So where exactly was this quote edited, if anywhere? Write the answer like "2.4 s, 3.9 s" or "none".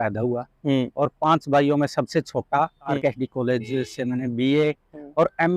3.0 s

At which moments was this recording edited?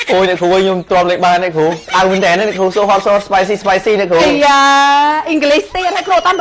none

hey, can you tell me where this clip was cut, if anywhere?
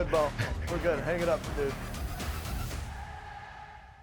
1.8 s

